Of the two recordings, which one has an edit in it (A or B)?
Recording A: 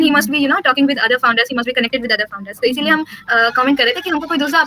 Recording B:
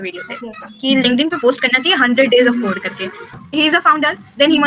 B